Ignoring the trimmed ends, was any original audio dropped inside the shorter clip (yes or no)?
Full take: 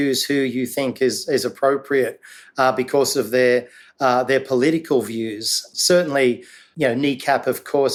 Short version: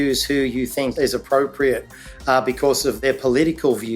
yes